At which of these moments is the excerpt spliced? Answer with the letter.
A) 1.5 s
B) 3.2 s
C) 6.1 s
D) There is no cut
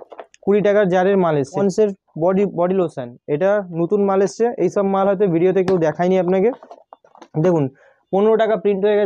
A